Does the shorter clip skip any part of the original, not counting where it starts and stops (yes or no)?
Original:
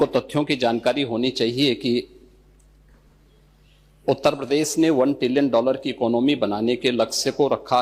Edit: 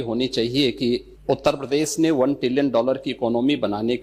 yes